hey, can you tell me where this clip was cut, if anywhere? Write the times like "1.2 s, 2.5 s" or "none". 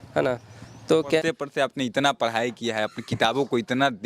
1.2 s

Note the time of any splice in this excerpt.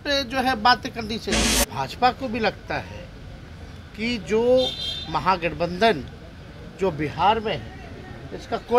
1.4 s

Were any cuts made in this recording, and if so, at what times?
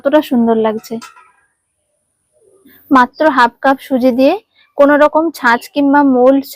2.7 s

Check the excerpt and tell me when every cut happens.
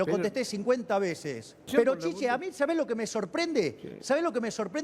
1.7 s

